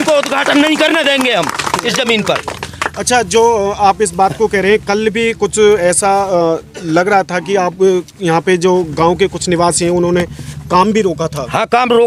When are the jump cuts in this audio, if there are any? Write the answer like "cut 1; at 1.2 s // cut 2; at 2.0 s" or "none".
none